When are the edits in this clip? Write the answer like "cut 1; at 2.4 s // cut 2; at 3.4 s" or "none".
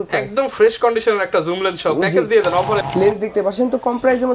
cut 1; at 2.8 s